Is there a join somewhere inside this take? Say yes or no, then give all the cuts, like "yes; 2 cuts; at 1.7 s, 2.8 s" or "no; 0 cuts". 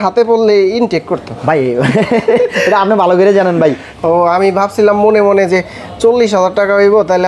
yes; 1 cut; at 3.9 s